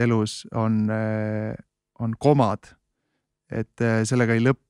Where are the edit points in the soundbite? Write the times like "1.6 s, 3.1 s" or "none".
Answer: none